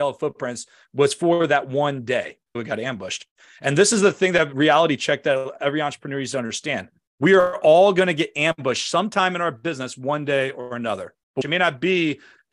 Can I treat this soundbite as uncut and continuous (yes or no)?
no